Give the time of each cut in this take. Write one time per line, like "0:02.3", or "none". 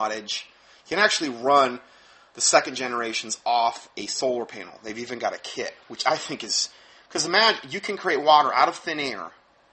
0:05.5